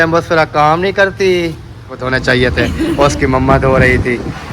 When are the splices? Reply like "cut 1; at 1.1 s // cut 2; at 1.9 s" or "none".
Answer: cut 1; at 2.0 s